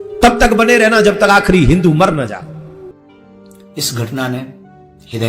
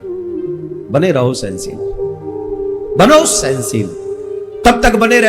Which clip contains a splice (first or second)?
first